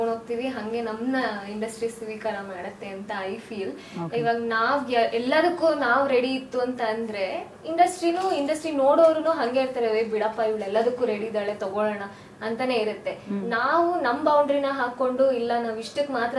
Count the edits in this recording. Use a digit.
0